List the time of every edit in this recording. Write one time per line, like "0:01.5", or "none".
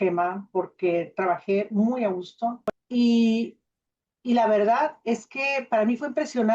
0:02.8